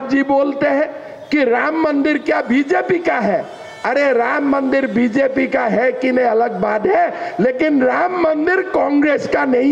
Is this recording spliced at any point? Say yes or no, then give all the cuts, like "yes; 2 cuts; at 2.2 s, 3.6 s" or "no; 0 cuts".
no; 0 cuts